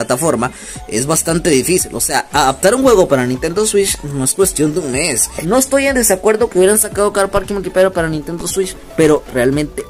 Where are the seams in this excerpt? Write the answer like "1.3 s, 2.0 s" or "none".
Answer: 5.3 s

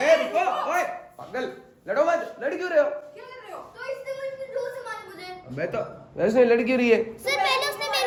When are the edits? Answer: none

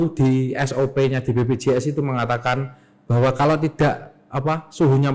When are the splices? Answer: none

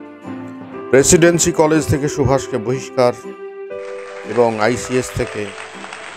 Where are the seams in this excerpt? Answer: 1.0 s

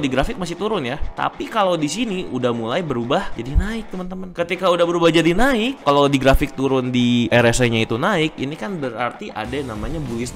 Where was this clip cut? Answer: 1.0 s, 3.3 s

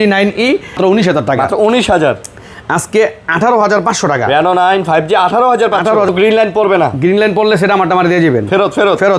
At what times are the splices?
0.8 s, 6.1 s

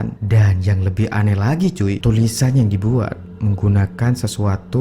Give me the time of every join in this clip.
2.0 s

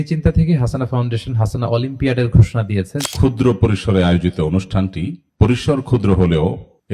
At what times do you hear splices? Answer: 3.0 s

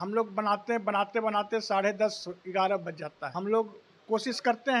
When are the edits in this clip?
3.2 s

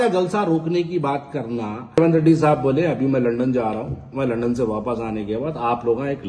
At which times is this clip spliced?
2.0 s

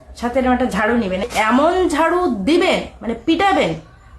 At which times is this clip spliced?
1.3 s

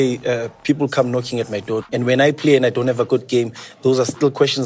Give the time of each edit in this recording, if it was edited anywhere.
1.8 s

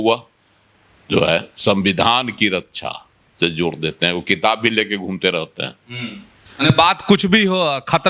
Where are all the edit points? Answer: none

